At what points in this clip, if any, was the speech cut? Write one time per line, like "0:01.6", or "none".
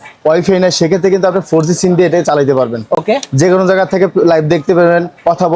none